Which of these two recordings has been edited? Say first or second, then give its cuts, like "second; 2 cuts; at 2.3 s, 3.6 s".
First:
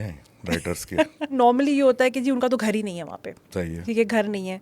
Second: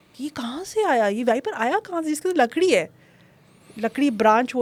first; 1 cut; at 1.3 s